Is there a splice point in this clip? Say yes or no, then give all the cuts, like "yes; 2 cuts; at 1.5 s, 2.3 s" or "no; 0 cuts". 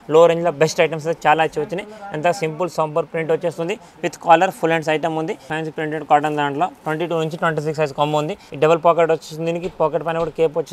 yes; 2 cuts; at 5.5 s, 8.4 s